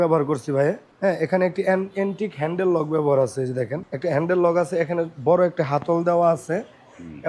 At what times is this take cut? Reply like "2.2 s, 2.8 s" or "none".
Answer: 0.9 s, 3.8 s